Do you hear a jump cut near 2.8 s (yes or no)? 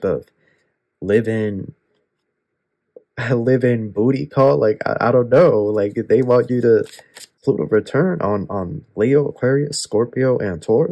no